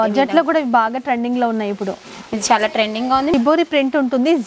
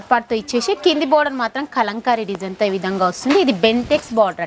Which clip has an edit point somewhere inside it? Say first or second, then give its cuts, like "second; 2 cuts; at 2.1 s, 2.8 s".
first; 1 cut; at 3.3 s